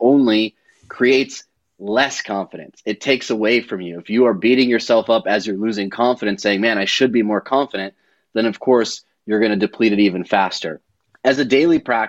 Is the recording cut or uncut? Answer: uncut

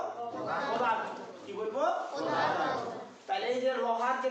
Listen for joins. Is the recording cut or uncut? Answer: uncut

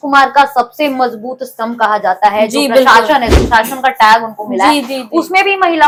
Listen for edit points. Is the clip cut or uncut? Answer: uncut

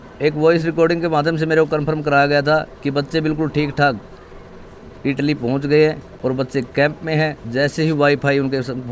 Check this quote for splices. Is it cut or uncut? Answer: uncut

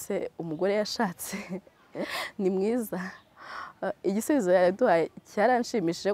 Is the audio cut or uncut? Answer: uncut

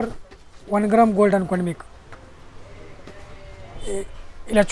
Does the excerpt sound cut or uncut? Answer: cut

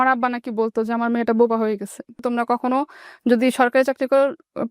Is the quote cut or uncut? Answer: cut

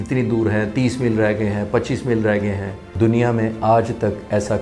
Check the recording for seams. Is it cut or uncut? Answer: cut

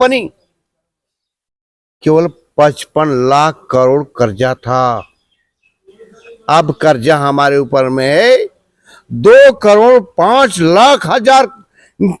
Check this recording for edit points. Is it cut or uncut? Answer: uncut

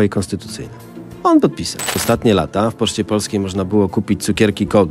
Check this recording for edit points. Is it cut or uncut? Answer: cut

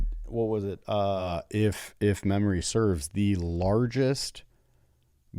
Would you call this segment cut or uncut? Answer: cut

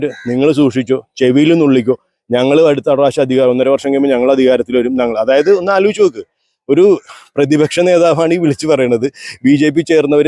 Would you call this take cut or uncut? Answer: uncut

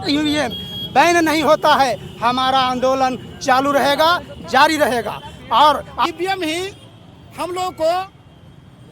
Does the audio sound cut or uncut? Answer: cut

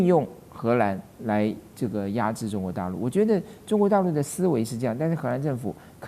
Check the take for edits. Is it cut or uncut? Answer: uncut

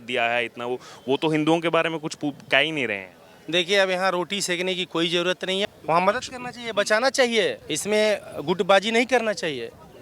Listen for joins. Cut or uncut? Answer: cut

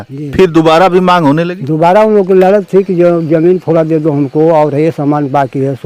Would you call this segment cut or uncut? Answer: uncut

